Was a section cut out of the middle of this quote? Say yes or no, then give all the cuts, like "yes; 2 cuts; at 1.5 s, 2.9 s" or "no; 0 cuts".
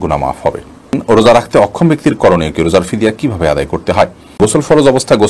yes; 2 cuts; at 1.0 s, 4.4 s